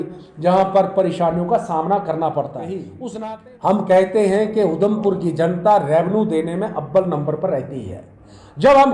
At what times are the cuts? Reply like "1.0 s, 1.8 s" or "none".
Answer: 2.9 s